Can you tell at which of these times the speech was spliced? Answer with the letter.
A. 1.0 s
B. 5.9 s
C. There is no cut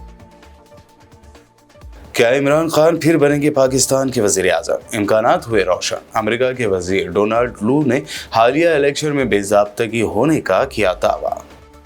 A